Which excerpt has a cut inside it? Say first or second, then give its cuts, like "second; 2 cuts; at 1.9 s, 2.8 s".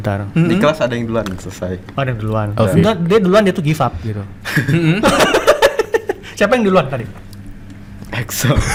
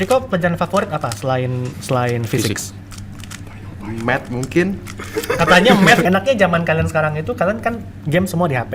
second; 2 cuts; at 1.7 s, 6.0 s